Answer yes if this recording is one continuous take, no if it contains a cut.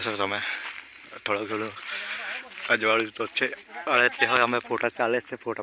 yes